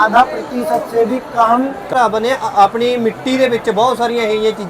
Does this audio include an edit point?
yes; 1 cut; at 1.9 s

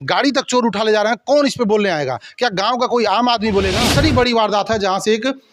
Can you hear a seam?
yes; 1 cut; at 3.8 s

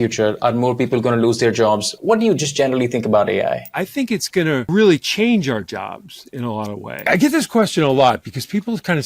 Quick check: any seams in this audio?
yes; 2 cuts; at 3.7 s, 7.1 s

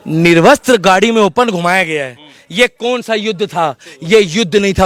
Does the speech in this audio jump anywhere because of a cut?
no; 0 cuts

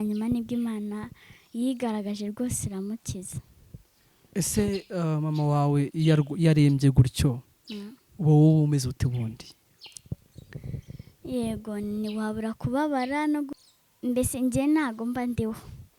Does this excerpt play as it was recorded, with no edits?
no; 1 cut; at 13.5 s

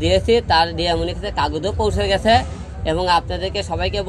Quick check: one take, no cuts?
yes; 0 cuts

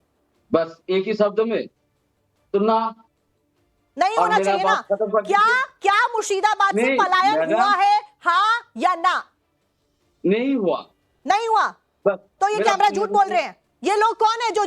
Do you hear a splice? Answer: yes; 1 cut; at 12.5 s

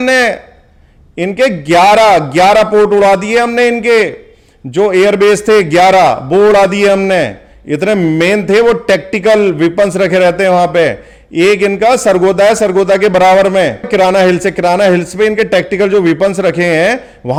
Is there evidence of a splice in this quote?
no; 0 cuts

